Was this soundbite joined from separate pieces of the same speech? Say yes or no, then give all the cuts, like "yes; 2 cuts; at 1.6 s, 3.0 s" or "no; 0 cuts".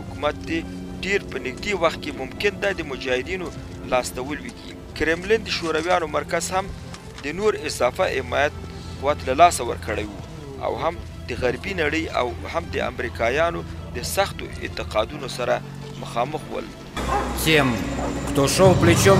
yes; 1 cut; at 17.0 s